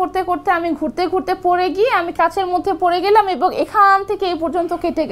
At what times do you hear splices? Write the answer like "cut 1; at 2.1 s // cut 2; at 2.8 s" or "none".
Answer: none